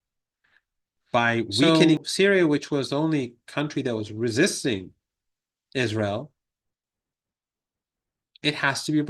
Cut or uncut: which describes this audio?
cut